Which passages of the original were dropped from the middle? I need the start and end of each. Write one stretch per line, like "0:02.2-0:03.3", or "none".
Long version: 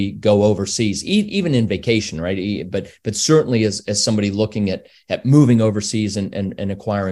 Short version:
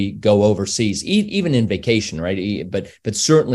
none

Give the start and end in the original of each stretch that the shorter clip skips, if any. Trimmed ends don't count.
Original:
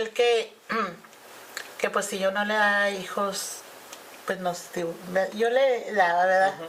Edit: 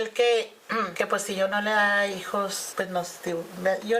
0:00.9-0:01.7
0:03.5-0:04.1

